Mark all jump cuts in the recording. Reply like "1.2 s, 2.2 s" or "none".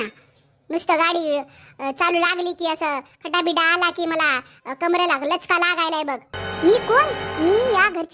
6.3 s